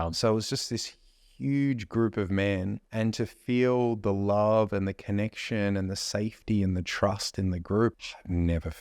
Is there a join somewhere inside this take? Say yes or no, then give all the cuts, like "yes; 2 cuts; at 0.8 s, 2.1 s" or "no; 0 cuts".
yes; 2 cuts; at 2.8 s, 7.9 s